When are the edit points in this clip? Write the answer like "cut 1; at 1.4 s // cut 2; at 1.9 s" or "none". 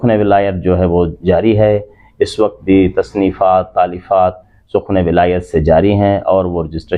none